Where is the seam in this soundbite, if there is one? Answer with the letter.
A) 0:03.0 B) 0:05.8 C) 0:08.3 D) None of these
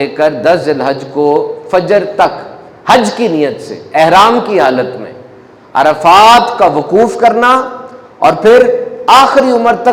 D